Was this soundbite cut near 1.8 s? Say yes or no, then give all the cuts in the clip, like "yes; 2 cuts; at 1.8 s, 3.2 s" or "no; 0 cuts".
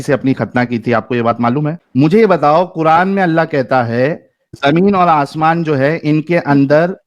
yes; 2 cuts; at 1.8 s, 4.5 s